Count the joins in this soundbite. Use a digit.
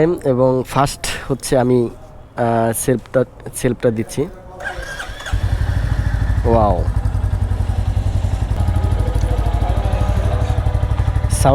1